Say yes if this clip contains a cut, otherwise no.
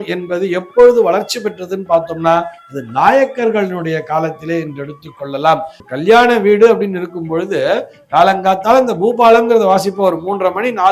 yes